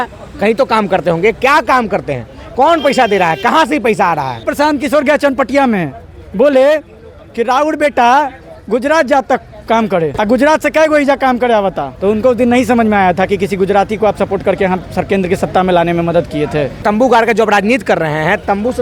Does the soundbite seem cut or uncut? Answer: cut